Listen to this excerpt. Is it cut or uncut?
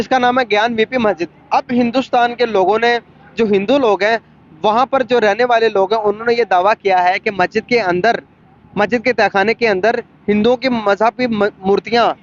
uncut